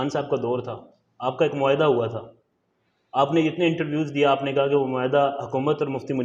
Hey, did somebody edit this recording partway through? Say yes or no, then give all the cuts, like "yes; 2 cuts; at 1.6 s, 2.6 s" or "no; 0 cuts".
no; 0 cuts